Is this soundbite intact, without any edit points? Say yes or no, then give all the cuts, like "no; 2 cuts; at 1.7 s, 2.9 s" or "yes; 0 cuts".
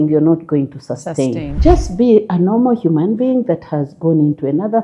no; 1 cut; at 1.5 s